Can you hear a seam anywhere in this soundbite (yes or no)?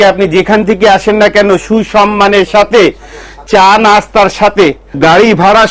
no